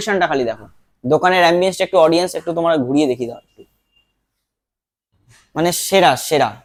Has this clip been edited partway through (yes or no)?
no